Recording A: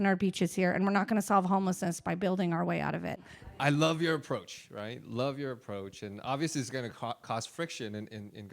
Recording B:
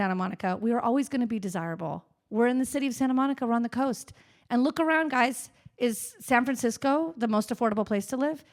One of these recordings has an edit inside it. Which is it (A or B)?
A